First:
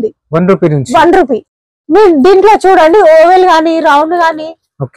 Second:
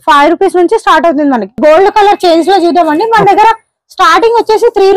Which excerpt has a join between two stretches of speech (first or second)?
second